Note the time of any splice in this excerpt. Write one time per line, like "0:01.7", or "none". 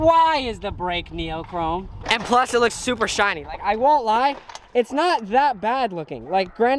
0:02.0